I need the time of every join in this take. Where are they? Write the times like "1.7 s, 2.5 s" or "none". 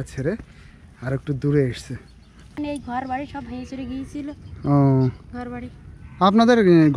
2.6 s